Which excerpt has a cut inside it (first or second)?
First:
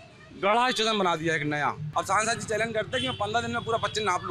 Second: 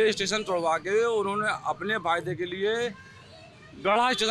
first